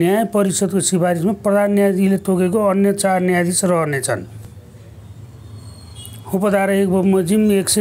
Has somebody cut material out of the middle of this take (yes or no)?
no